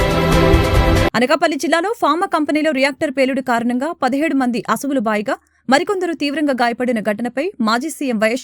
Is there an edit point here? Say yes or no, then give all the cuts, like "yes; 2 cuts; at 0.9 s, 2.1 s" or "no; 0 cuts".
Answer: yes; 1 cut; at 1.0 s